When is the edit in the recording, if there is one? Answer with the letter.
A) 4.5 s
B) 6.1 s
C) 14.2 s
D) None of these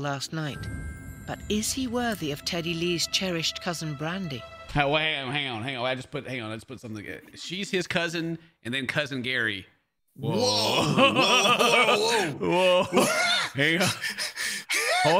A